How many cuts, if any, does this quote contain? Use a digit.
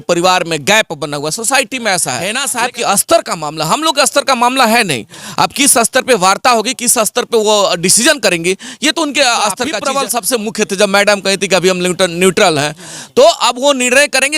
2